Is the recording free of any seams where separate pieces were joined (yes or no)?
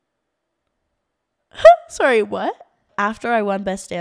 no